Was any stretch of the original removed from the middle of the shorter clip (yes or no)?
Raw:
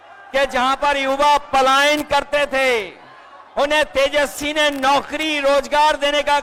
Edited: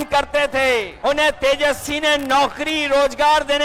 yes